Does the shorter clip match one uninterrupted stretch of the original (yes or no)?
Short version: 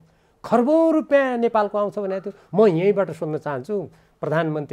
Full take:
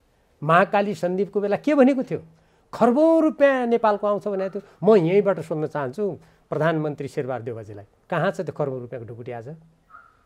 yes